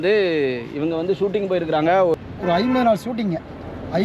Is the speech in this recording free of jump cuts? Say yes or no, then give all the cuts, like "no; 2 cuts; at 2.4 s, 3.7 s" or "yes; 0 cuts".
no; 1 cut; at 2.2 s